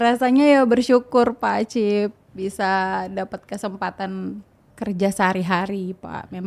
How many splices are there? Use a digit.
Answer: 1